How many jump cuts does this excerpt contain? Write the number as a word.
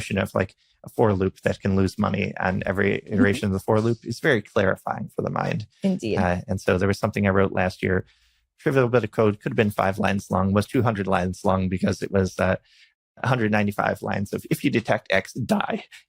zero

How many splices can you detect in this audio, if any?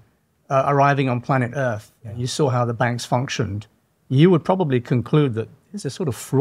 zero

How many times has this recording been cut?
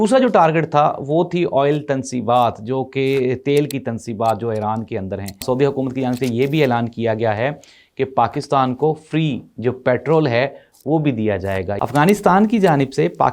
two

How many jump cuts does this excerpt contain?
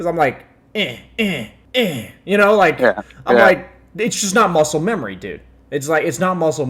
one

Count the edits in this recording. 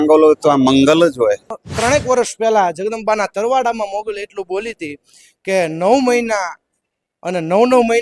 one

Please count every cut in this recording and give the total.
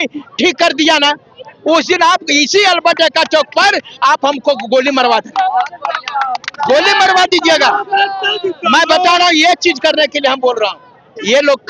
zero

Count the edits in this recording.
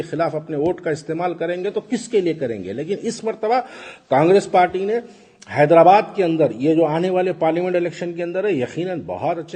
zero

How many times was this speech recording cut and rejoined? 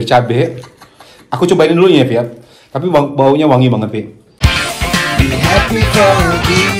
one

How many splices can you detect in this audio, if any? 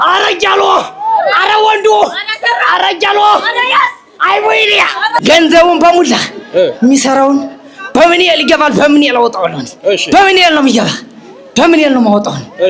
one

